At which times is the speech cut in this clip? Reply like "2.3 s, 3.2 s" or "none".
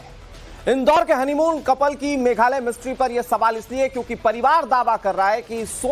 3.4 s